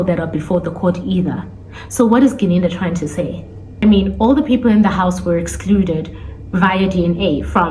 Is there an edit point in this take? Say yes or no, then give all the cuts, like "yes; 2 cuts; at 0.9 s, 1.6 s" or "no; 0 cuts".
no; 0 cuts